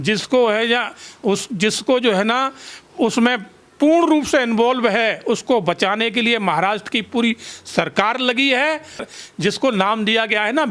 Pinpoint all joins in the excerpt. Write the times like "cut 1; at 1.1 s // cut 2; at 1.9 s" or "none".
cut 1; at 9.1 s